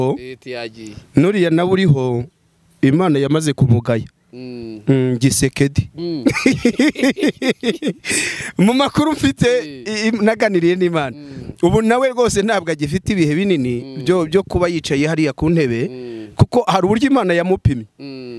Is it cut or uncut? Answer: uncut